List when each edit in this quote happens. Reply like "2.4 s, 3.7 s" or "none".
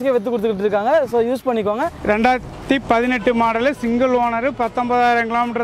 1.9 s